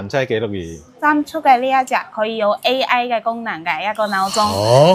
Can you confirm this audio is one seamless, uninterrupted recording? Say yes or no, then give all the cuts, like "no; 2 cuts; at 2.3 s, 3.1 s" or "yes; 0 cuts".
no; 1 cut; at 0.9 s